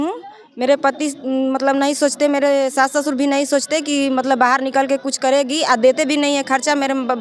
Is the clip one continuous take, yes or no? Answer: yes